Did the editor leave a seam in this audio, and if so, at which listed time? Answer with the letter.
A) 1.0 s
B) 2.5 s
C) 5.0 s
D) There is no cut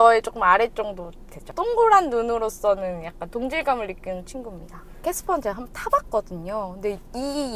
C